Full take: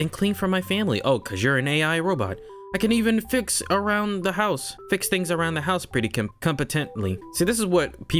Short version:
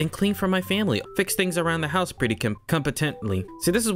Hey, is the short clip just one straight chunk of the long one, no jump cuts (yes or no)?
no